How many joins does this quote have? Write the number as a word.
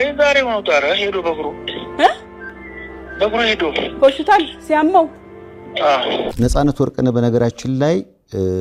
one